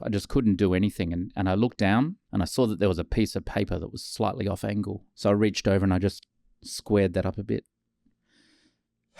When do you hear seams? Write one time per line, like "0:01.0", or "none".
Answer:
none

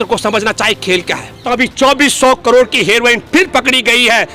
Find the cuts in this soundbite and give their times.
0:01.4

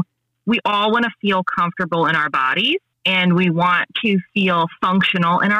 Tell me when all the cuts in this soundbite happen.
0:02.9

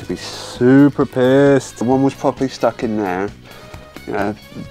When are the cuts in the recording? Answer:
0:01.8

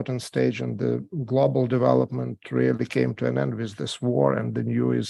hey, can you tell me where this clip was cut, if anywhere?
none

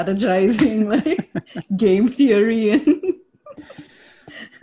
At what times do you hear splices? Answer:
none

